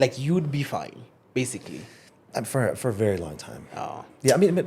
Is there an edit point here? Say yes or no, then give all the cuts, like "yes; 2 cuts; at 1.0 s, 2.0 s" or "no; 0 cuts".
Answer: no; 0 cuts